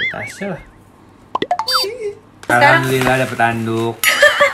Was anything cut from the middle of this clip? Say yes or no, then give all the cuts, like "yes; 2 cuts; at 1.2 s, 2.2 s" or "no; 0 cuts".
yes; 1 cut; at 2.5 s